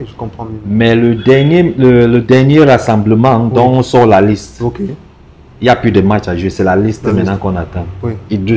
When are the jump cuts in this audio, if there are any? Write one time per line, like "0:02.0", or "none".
none